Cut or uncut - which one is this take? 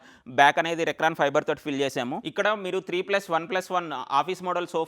cut